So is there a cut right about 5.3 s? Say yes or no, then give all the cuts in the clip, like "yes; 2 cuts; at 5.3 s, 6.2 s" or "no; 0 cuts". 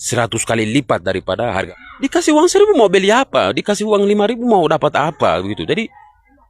no; 1 cut; at 1.7 s